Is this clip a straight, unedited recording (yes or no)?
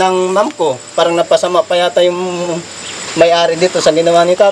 yes